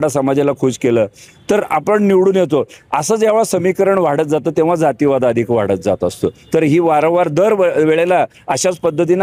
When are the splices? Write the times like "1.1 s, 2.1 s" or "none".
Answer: none